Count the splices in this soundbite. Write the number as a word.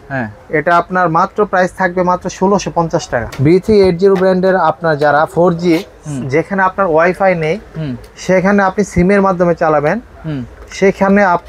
one